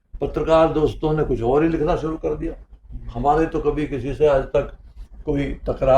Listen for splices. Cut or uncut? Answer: uncut